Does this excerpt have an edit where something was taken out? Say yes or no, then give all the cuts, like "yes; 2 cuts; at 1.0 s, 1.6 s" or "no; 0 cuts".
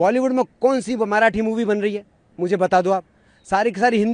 no; 0 cuts